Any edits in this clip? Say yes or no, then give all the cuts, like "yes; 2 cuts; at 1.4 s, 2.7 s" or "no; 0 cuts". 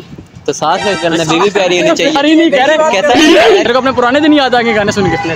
yes; 1 cut; at 3.5 s